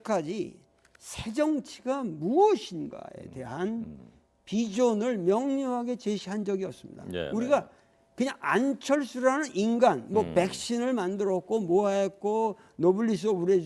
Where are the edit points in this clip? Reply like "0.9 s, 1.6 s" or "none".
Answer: none